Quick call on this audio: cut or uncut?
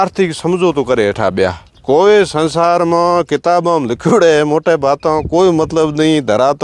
uncut